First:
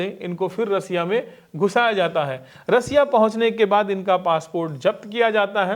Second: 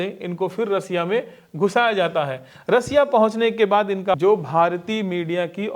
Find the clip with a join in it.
second; 1 cut; at 4.2 s

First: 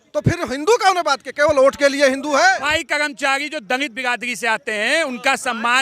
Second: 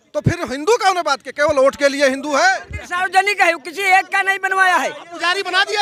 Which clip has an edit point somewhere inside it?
first; 1 cut; at 2.7 s

